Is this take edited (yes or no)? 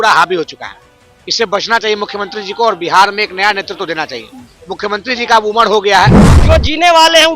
yes